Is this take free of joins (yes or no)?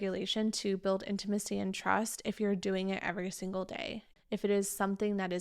no